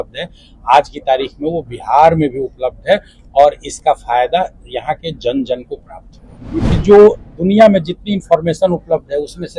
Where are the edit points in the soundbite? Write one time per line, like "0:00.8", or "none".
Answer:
0:06.7